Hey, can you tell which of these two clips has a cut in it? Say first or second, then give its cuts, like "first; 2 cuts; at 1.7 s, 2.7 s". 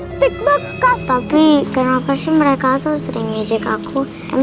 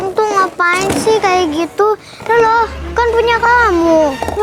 first; 1 cut; at 1.0 s